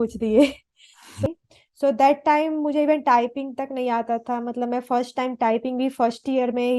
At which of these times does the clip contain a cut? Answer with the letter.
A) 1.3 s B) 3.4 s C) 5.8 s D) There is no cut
A